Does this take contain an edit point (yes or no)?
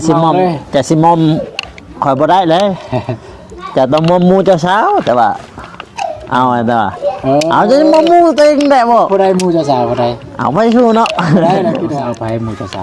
yes